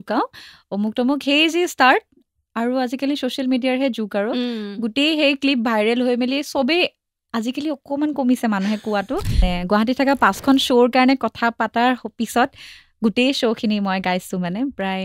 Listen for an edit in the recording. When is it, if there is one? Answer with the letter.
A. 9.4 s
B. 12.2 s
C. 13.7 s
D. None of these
A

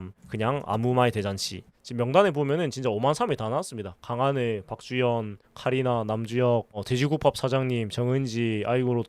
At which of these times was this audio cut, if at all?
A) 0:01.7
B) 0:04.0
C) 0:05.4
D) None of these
A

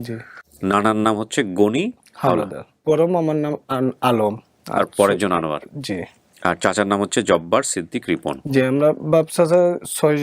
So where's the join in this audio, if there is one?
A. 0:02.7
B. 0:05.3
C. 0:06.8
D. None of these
A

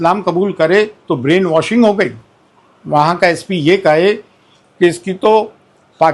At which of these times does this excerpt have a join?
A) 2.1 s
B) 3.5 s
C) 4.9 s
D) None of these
D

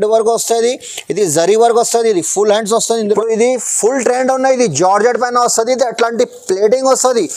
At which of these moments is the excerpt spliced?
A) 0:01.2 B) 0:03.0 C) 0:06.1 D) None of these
B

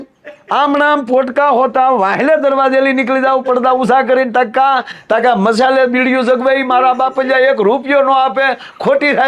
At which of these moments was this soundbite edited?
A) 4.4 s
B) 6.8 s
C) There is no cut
C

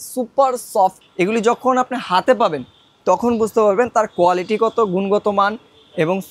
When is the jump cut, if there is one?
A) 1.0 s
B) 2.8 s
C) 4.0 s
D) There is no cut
A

